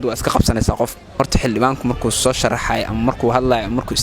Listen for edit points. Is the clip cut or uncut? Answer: cut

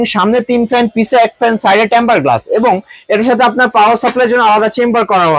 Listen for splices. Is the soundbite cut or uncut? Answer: uncut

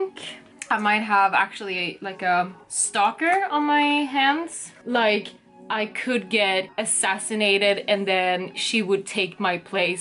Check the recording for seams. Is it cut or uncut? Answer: cut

